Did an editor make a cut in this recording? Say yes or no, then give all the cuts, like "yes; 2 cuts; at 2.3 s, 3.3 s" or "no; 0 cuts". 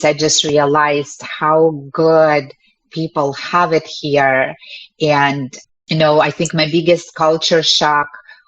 yes; 1 cut; at 5.5 s